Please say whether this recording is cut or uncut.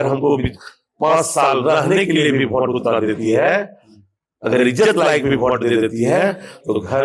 uncut